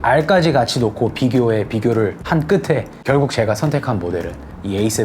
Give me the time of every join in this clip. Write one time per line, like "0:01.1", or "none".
0:02.2
0:02.9